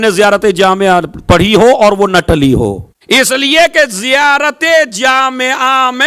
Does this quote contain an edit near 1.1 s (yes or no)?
no